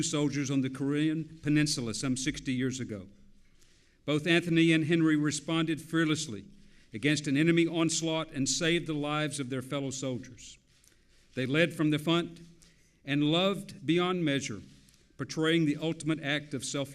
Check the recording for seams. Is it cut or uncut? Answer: cut